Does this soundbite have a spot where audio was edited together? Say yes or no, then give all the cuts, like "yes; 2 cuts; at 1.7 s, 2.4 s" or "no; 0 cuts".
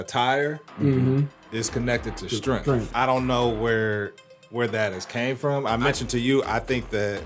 yes; 2 cuts; at 1.4 s, 2.9 s